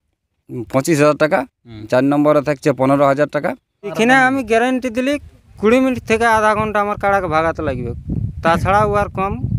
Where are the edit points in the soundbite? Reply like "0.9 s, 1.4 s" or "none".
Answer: 1.8 s, 3.8 s